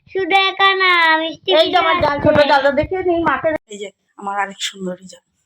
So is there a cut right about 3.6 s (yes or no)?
yes